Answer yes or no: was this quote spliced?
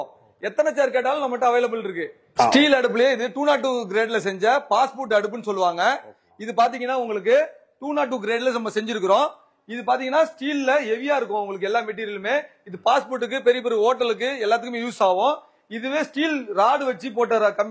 yes